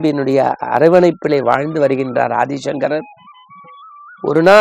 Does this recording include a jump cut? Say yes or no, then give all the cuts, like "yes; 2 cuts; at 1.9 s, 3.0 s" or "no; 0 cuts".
no; 0 cuts